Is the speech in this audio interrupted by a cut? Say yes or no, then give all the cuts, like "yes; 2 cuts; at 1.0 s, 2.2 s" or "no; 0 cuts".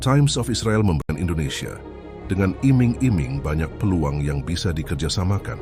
yes; 1 cut; at 1.1 s